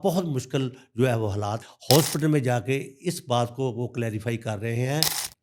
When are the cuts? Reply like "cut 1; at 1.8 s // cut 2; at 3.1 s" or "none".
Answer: cut 1; at 1.6 s